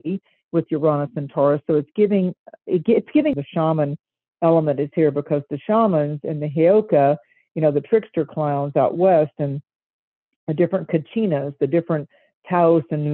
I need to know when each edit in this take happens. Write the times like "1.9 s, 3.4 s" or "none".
3.3 s